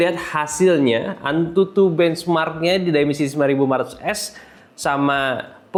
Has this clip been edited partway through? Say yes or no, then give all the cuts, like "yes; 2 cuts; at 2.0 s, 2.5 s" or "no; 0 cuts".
no; 0 cuts